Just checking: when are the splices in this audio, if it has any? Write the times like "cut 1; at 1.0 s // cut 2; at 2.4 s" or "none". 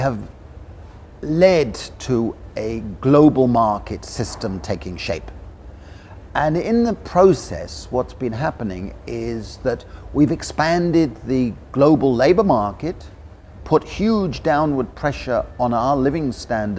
cut 1; at 12.8 s